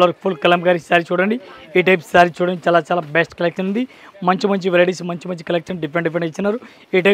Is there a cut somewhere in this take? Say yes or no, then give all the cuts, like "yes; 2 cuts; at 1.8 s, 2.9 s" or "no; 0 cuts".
no; 0 cuts